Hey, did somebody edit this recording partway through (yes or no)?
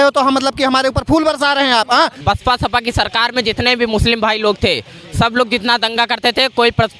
yes